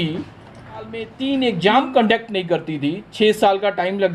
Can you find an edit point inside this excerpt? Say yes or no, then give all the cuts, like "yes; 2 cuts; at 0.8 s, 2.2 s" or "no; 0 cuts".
yes; 1 cut; at 1.0 s